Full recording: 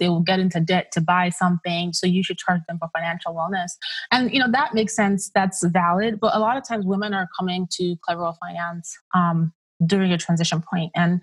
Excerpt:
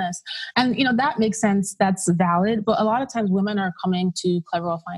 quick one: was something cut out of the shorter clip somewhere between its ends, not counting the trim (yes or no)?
no